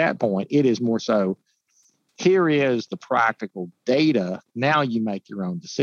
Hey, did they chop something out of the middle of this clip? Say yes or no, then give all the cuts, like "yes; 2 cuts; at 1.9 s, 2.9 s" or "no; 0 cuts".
no; 0 cuts